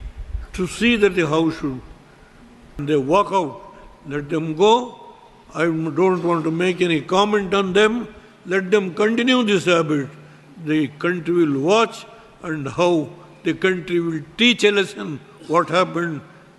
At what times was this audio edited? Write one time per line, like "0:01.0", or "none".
0:02.8